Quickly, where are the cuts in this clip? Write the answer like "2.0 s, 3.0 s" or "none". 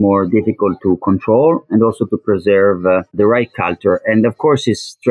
3.5 s

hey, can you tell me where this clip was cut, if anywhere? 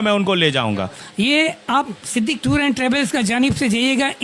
1.0 s

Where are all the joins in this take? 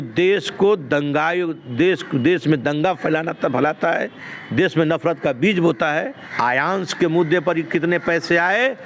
6.2 s

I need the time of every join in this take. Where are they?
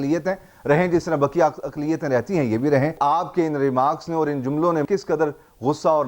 2.9 s, 4.8 s

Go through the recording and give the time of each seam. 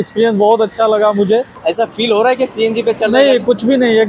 1.5 s

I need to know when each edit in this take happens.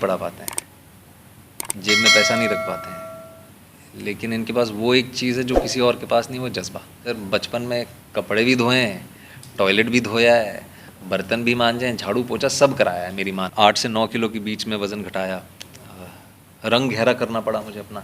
7.1 s, 13.5 s

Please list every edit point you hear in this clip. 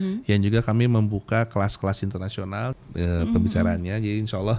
2.7 s

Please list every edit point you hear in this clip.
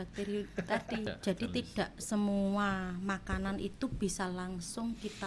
1.1 s

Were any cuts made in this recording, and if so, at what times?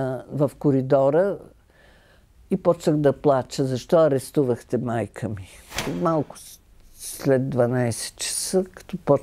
5.8 s

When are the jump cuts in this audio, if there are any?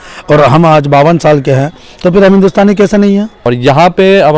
3.4 s

